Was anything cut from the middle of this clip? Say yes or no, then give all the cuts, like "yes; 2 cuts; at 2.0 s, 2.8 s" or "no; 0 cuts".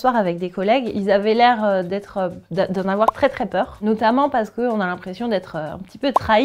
yes; 2 cuts; at 0.9 s, 3.7 s